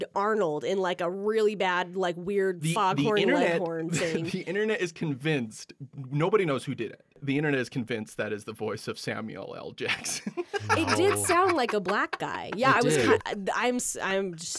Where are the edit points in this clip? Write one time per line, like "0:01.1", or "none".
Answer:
0:07.2
0:13.2